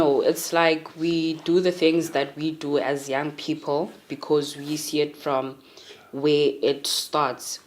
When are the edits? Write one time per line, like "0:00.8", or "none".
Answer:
0:01.0